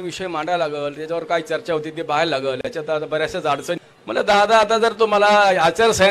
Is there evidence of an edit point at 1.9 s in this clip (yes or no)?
no